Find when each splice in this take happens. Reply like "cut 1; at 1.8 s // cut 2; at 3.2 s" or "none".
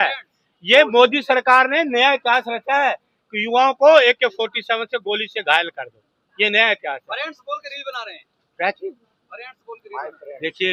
none